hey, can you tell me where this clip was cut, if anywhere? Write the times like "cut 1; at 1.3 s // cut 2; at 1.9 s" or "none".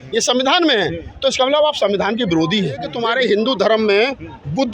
cut 1; at 2.9 s